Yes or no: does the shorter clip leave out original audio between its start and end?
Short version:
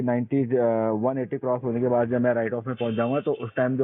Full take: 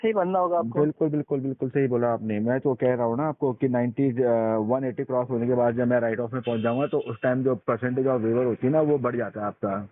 no